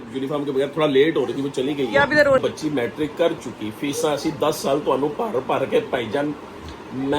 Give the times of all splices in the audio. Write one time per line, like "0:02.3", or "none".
0:02.4